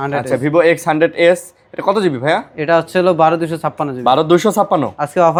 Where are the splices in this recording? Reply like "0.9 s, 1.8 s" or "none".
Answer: none